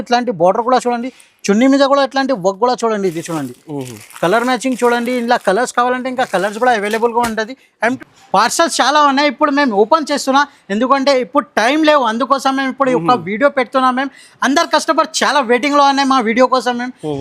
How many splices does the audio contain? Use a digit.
1